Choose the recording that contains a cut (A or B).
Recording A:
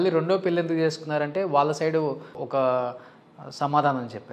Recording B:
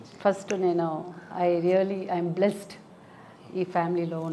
A